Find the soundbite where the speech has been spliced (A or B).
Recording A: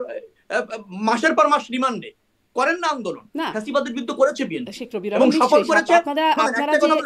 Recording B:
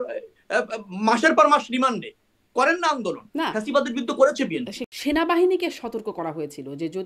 B